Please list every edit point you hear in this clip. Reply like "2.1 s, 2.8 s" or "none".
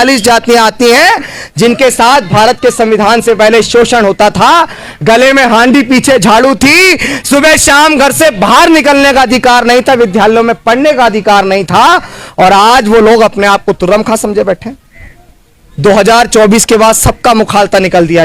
none